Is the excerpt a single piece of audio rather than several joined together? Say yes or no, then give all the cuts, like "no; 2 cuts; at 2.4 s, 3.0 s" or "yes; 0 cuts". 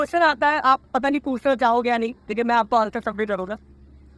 yes; 0 cuts